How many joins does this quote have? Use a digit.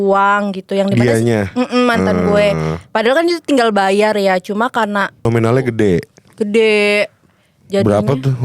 1